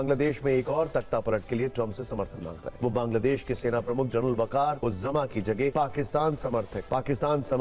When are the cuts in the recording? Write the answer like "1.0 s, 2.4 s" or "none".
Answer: 2.6 s, 4.8 s, 5.7 s